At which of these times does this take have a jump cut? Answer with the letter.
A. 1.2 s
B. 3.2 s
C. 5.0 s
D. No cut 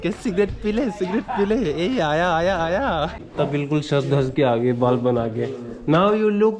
B